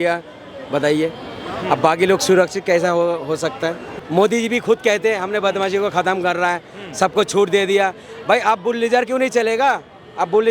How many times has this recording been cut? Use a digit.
1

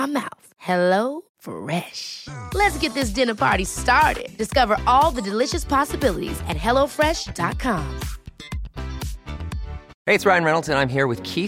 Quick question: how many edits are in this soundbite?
1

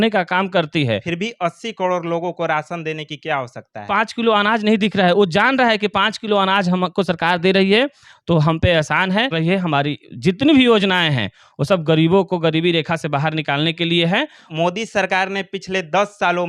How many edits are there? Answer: 4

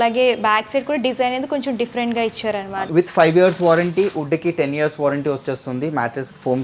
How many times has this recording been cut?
1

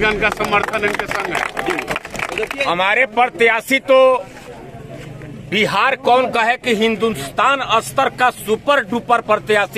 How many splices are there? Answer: 1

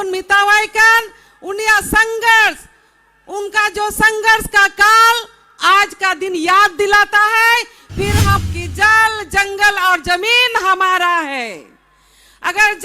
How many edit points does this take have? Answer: 1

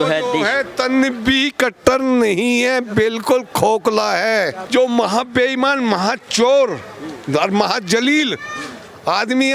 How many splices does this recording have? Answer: 1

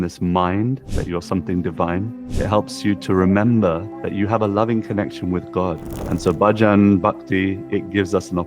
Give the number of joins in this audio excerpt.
4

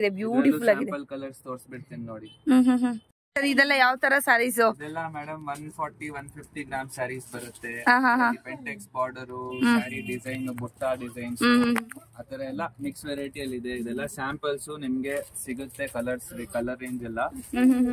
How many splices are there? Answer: 1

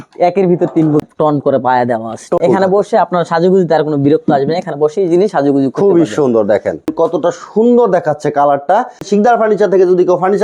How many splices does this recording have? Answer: 4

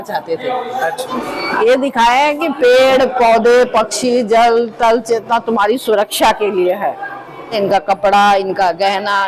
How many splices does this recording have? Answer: 2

